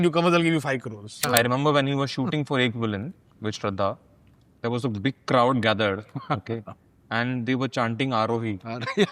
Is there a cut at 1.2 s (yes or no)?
yes